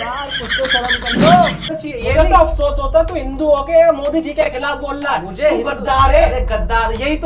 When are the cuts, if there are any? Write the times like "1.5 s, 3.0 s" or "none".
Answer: 1.7 s